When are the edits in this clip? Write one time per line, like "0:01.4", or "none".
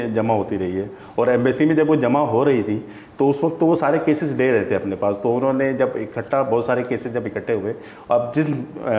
none